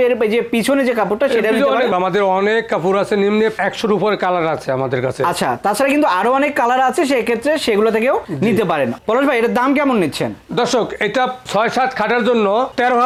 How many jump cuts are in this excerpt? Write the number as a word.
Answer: zero